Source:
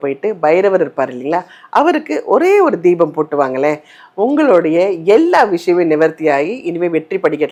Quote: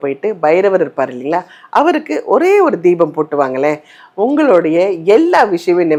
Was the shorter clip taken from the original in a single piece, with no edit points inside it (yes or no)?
yes